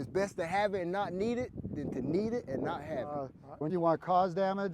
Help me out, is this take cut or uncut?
cut